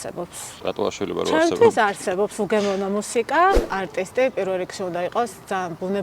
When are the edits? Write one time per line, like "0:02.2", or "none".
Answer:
0:03.7